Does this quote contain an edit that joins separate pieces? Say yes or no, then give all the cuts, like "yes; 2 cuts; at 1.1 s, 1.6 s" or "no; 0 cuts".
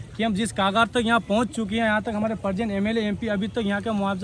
no; 0 cuts